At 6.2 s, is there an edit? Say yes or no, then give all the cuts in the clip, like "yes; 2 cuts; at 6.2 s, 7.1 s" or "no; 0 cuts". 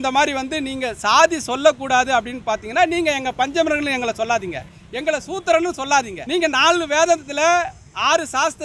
yes; 1 cut; at 6.2 s